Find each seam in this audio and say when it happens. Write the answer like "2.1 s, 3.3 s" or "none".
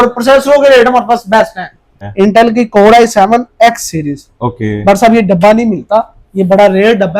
1.9 s